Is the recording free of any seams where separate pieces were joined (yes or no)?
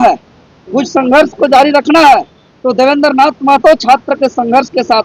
yes